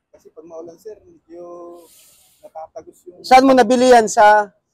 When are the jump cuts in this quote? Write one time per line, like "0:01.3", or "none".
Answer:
none